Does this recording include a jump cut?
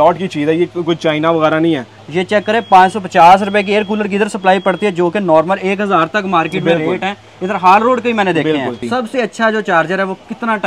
yes; 2 cuts; at 1.9 s, 8.8 s

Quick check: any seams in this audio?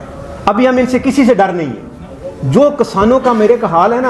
no; 0 cuts

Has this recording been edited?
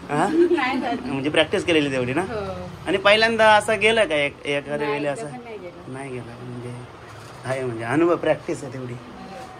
no; 0 cuts

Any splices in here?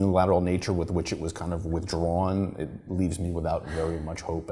no; 0 cuts

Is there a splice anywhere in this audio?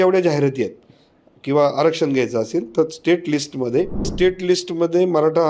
yes; 1 cut; at 4.1 s

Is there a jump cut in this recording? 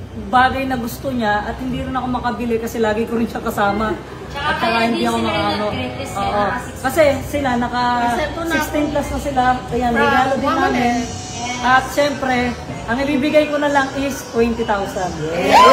no; 0 cuts

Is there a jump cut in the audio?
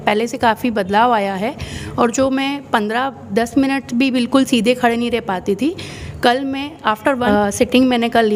no; 0 cuts

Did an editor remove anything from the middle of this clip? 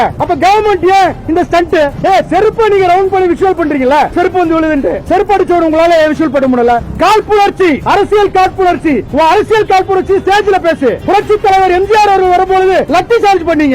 yes; 5 cuts; at 1.9 s, 6.8 s, 7.8 s, 9.1 s, 11.0 s

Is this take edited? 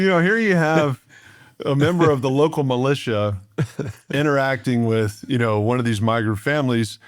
no; 0 cuts

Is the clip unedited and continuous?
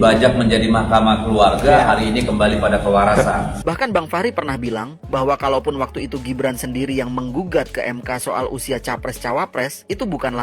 no; 1 cut; at 3.5 s

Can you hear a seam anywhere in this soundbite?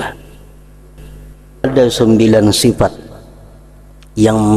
yes; 1 cut; at 1.6 s

